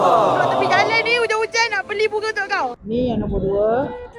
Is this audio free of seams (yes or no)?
no